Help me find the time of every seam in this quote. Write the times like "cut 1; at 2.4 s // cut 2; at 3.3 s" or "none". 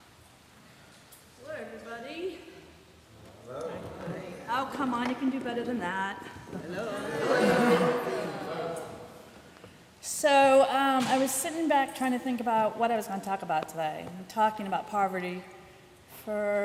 none